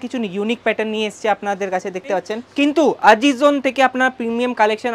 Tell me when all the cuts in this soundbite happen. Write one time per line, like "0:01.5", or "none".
0:02.5